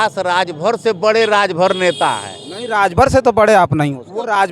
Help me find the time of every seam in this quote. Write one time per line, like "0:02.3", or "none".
0:03.5